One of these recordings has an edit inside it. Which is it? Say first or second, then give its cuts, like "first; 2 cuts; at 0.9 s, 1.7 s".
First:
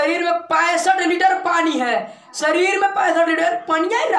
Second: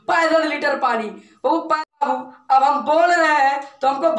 second; 1 cut; at 2.0 s